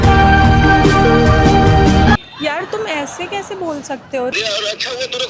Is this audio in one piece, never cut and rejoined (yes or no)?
no